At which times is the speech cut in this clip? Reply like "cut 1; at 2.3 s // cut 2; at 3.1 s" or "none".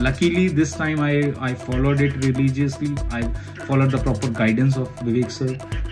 none